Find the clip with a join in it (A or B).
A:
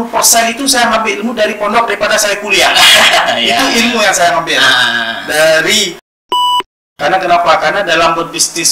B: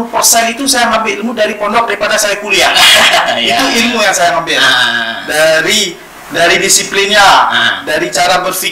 A